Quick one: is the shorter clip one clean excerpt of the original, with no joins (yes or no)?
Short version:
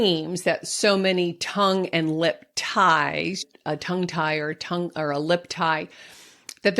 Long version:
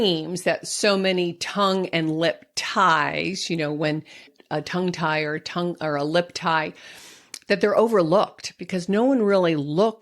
no